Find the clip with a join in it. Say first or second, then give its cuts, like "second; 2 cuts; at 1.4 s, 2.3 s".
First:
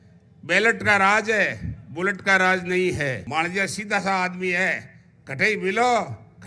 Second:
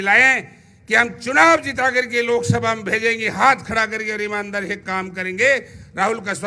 first; 1 cut; at 3.2 s